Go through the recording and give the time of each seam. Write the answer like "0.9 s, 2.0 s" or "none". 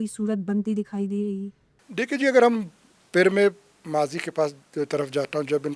none